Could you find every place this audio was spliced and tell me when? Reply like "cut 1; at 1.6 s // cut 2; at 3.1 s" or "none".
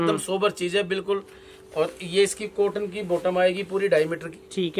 none